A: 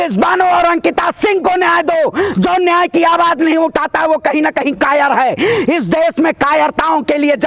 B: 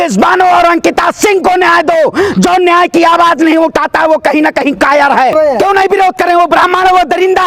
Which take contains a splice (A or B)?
B